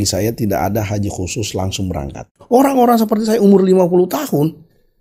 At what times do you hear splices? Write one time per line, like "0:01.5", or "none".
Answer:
0:02.3